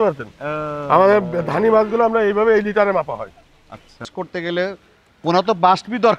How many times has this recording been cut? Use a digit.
1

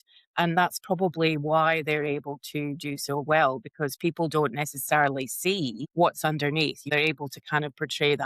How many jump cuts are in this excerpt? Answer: 2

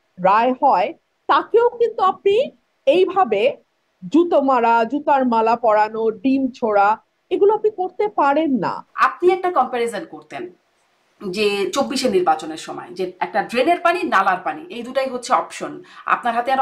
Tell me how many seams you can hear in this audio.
1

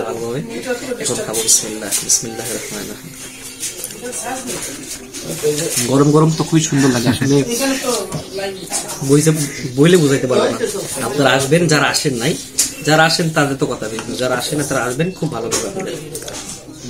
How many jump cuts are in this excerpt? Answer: 0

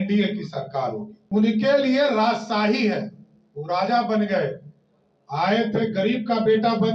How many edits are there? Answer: 1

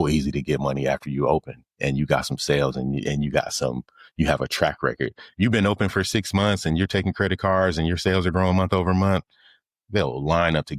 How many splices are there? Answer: 0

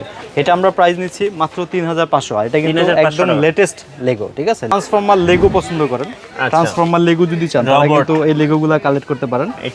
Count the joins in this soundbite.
1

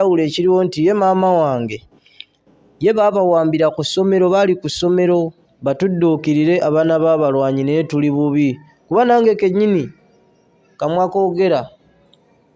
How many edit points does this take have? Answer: 1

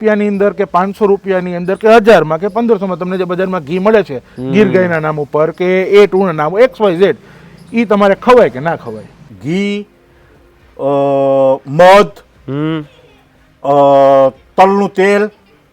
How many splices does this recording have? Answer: 1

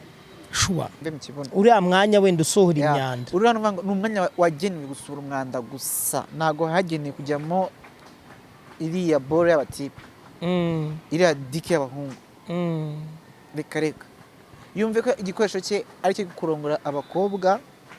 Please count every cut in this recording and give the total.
1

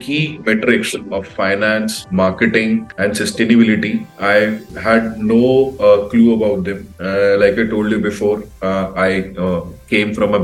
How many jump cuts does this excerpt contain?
0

